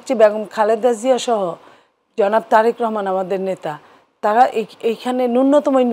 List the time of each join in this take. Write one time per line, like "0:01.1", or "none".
none